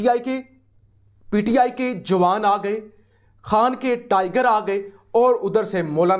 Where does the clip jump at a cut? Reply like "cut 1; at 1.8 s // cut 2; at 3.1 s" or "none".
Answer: none